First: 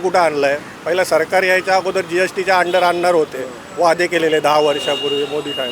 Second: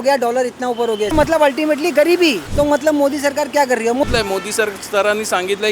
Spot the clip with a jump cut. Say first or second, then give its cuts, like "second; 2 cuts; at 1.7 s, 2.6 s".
second; 3 cuts; at 1.1 s, 2.4 s, 4.0 s